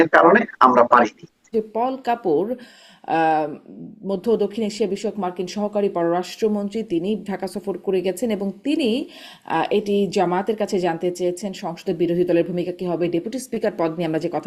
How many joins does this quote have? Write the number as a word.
one